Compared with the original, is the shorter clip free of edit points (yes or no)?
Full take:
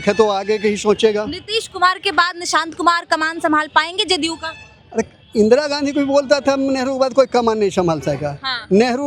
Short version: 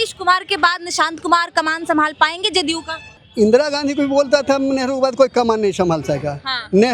no